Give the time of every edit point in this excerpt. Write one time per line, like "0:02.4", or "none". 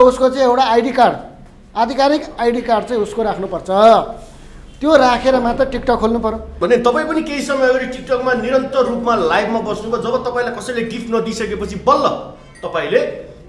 0:06.6